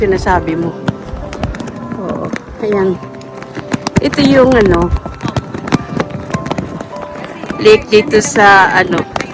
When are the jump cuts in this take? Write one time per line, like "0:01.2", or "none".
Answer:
none